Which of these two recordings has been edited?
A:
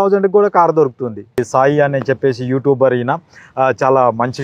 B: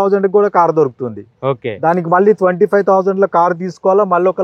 A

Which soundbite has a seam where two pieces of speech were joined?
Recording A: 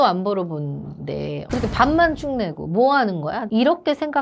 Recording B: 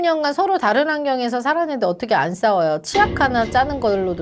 A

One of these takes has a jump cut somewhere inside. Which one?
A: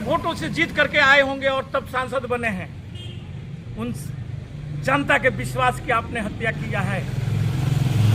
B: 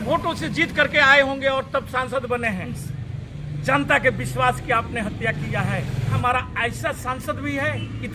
B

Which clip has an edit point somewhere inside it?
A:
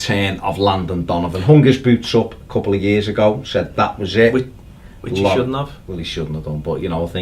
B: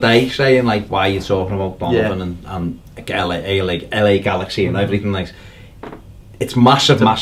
A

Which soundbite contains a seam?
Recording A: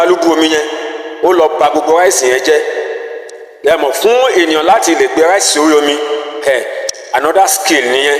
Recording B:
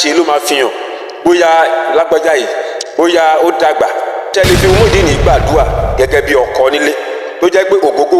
B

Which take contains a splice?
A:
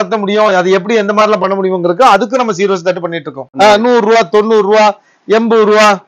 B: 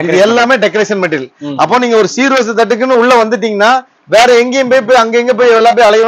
A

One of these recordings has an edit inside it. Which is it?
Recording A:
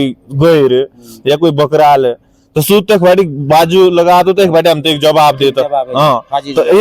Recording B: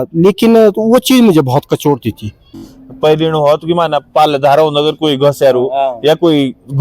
B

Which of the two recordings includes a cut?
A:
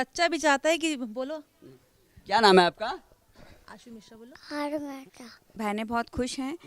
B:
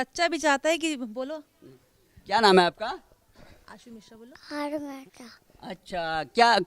A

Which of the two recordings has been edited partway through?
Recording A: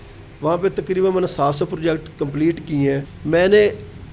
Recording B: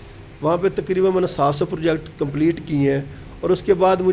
A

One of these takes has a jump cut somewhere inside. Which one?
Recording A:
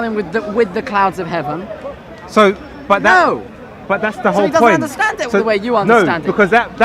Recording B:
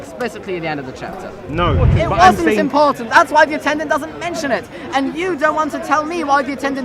B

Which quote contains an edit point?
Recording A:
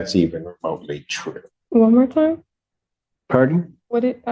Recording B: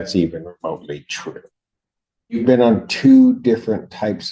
A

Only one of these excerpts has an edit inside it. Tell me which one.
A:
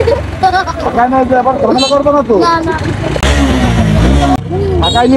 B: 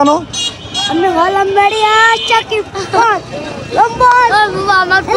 A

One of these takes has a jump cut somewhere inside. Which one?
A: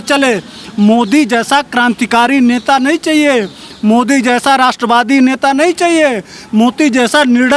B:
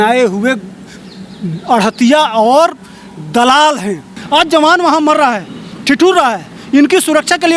B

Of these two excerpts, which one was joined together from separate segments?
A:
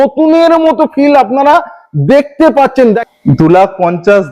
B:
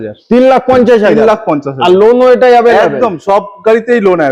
A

